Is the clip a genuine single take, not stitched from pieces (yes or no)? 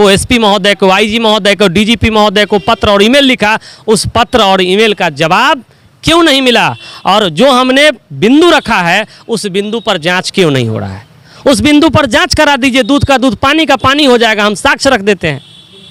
yes